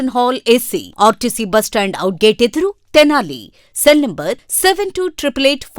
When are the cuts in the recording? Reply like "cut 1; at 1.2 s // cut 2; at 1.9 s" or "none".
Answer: none